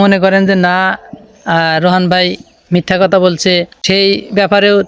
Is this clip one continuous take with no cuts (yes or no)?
no